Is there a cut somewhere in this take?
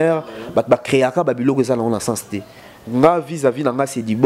no; 0 cuts

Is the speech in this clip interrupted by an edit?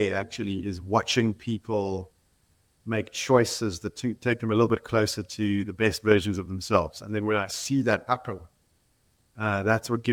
no; 0 cuts

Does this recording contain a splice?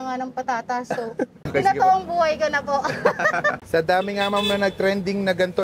yes; 2 cuts; at 1.4 s, 3.6 s

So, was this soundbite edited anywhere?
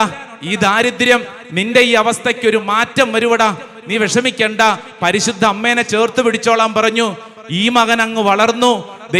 no; 0 cuts

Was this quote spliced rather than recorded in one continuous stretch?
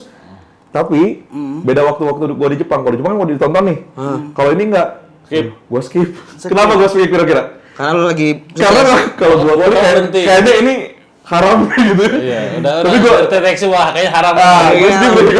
no; 0 cuts

